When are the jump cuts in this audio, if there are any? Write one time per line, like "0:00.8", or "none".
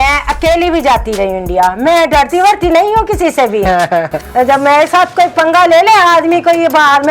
0:04.2